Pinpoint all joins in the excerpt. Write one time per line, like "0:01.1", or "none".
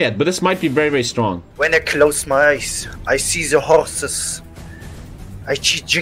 0:01.5